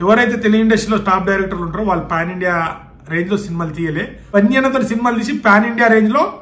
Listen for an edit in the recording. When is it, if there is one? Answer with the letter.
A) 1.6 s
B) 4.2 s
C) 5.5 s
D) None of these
B